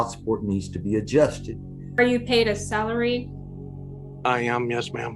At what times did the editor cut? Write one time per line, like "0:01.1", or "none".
0:02.0